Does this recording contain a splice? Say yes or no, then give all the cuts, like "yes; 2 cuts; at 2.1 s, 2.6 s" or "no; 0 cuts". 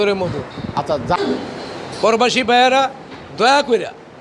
yes; 1 cut; at 1.2 s